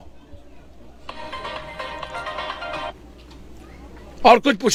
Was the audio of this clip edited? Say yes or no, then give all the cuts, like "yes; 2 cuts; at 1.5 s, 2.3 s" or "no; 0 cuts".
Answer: no; 0 cuts